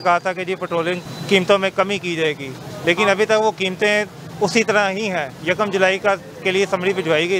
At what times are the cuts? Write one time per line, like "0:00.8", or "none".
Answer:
none